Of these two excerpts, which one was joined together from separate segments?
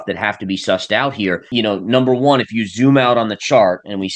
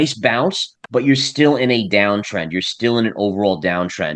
first; 1 cut; at 1.4 s

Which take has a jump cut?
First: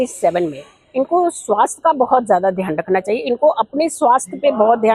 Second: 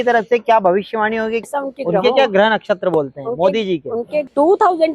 second; 2 cuts; at 1.4 s, 4.2 s

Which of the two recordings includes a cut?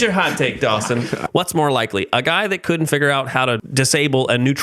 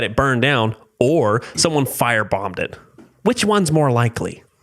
first; 2 cuts; at 1.2 s, 3.6 s

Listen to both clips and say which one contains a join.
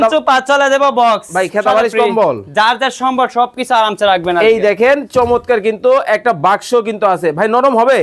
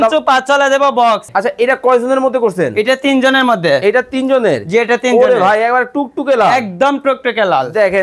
second; 1 cut; at 1.3 s

